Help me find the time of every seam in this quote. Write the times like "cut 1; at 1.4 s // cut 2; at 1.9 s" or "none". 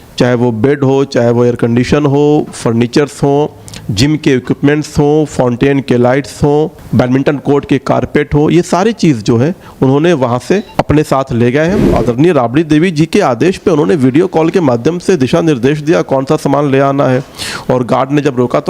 cut 1; at 6.8 s // cut 2; at 10.7 s // cut 3; at 11.9 s